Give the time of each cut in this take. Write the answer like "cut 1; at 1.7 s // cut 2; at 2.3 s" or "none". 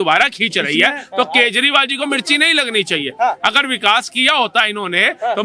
none